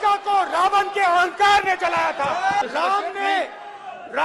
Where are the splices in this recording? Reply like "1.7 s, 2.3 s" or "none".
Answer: 2.6 s